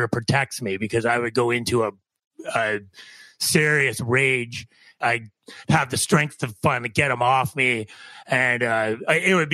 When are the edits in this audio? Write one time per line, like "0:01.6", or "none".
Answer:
0:04.9